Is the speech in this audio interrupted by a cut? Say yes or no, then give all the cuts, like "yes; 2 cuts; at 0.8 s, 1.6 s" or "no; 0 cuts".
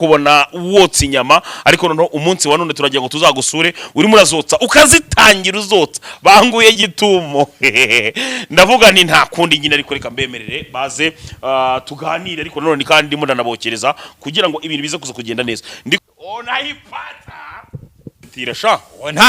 yes; 2 cuts; at 16.0 s, 18.2 s